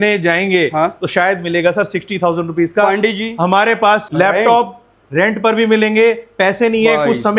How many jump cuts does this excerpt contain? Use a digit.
1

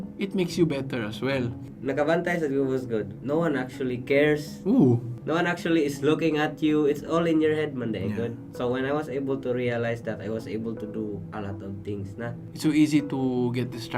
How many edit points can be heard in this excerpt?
4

